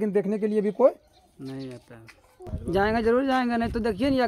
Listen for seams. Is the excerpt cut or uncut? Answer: cut